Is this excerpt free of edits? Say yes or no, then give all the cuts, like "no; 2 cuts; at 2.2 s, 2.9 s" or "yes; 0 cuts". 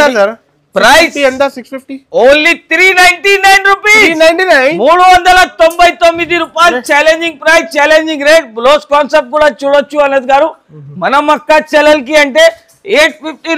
yes; 0 cuts